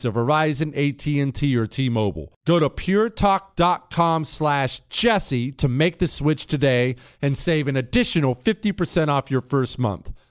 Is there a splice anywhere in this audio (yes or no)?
no